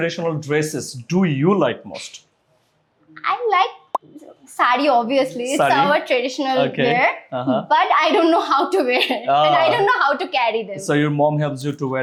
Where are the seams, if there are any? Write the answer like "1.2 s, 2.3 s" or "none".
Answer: none